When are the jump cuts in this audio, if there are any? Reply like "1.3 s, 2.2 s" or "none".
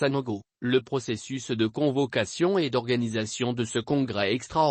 3.7 s